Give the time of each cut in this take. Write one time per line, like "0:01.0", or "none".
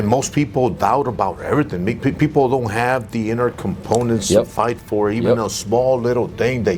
none